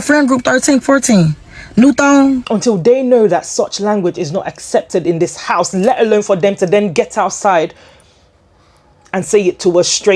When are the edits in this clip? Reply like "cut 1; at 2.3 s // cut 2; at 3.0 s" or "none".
cut 1; at 2.4 s

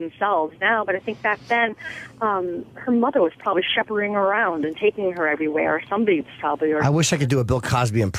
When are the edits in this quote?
none

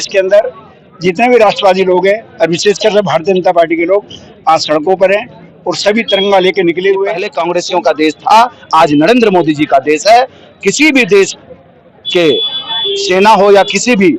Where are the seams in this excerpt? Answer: cut 1; at 7.3 s

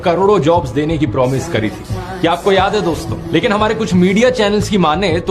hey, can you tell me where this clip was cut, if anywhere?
cut 1; at 2.0 s

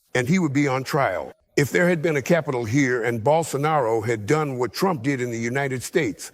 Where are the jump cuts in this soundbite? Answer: cut 1; at 1.4 s

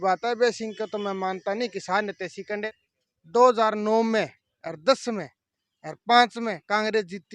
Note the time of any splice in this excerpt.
cut 1; at 2.7 s

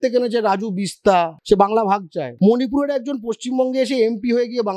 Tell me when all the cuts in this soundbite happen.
cut 1; at 1.4 s // cut 2; at 2.2 s

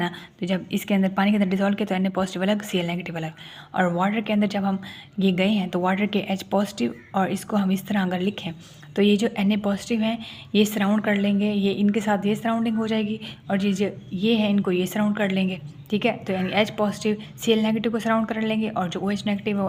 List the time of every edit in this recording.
none

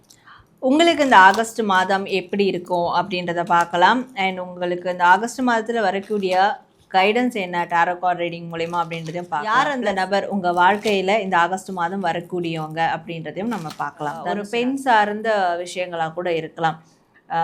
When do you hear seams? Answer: cut 1; at 9.5 s // cut 2; at 14.4 s

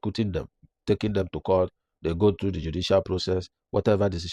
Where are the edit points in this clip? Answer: none

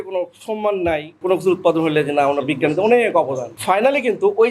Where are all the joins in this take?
cut 1; at 1.2 s // cut 2; at 3.5 s

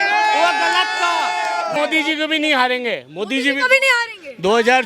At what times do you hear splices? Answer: cut 1; at 1.7 s

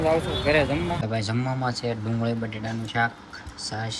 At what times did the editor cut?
cut 1; at 1.0 s

